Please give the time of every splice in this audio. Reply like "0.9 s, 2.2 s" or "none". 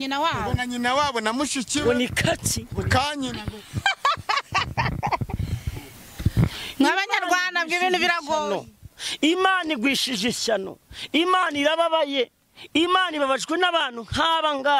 none